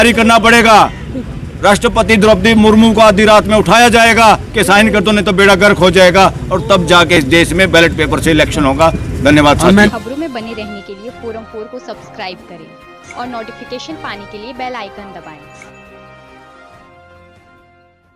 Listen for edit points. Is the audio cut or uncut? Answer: uncut